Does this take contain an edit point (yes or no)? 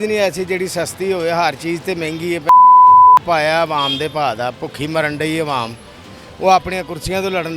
no